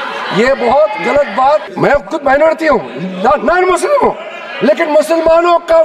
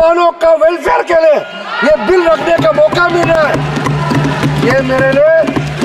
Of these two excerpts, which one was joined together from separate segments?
first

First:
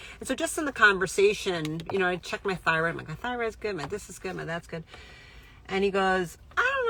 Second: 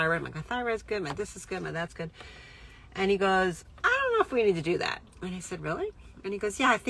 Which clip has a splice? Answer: second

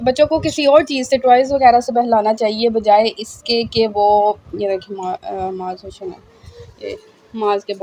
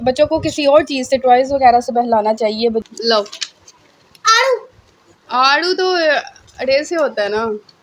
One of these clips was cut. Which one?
second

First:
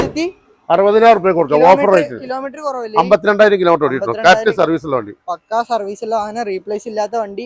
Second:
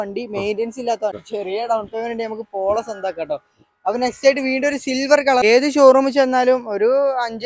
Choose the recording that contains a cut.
second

